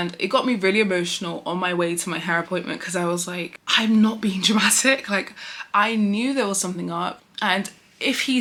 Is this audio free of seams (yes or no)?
yes